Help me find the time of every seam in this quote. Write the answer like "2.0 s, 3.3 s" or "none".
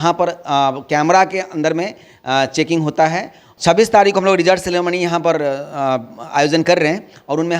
3.5 s